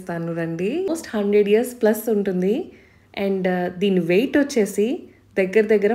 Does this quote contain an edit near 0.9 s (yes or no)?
yes